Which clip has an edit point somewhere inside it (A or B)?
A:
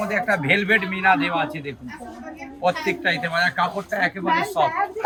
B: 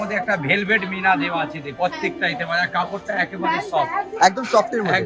B